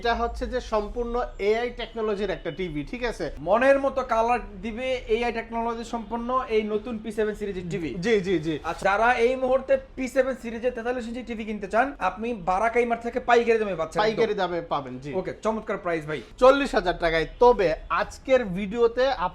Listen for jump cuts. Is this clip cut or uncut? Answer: cut